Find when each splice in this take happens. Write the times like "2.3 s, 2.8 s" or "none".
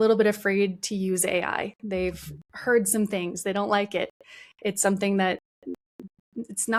none